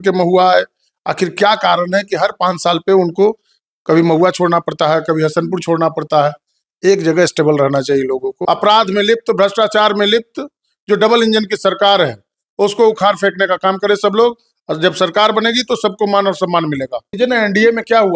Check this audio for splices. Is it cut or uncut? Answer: cut